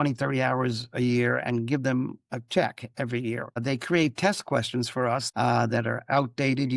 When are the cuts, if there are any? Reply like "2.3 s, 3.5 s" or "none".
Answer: 3.5 s, 5.3 s